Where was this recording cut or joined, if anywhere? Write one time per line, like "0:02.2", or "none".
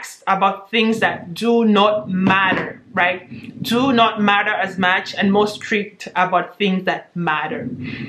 none